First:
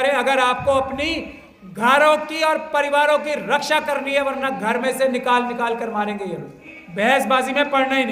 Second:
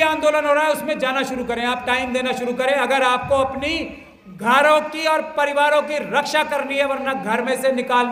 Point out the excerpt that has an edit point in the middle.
first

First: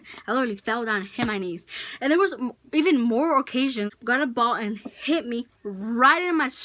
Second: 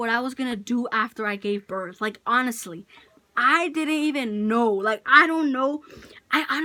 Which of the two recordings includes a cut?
first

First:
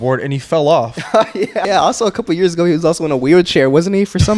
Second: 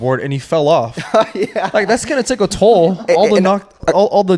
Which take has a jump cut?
first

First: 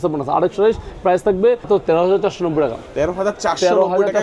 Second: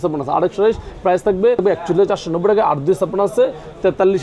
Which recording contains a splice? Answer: first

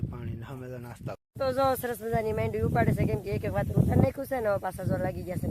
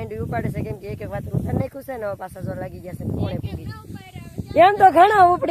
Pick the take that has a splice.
first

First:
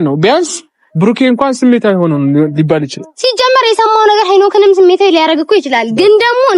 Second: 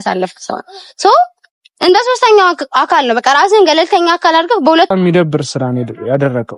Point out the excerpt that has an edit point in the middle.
second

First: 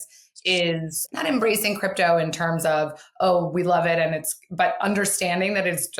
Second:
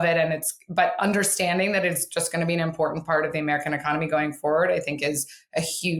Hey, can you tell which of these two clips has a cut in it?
first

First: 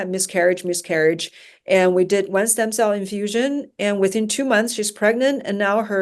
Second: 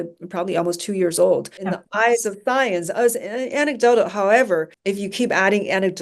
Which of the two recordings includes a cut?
second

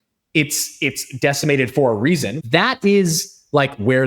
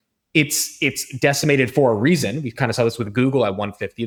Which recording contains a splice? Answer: first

